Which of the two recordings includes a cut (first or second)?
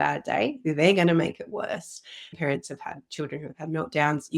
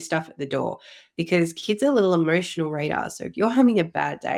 first